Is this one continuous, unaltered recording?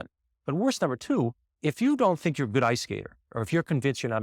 no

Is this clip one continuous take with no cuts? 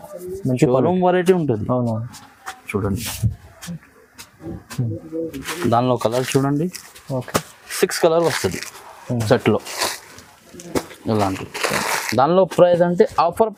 yes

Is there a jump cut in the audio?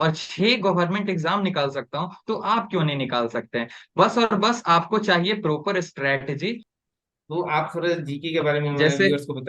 yes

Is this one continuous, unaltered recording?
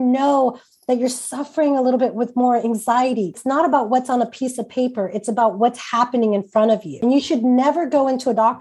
no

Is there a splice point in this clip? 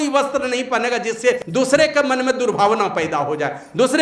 yes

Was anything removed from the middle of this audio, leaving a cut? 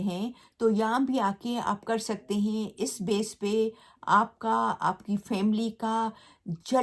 no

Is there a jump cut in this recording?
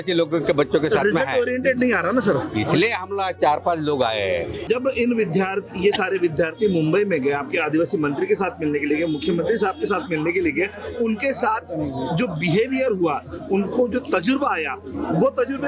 yes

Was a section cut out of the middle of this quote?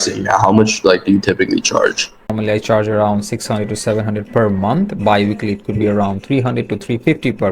yes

